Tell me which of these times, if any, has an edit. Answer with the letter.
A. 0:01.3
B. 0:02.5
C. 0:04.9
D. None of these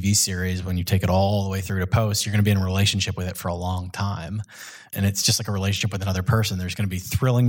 C